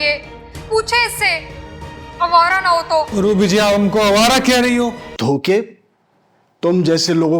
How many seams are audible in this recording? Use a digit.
1